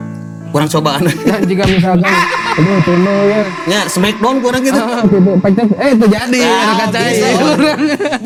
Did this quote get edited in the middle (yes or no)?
no